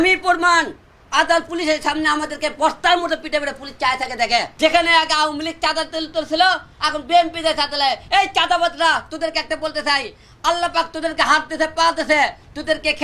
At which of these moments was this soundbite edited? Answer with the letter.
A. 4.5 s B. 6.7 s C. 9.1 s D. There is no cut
A